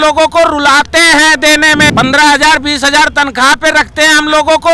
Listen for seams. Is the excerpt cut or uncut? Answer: cut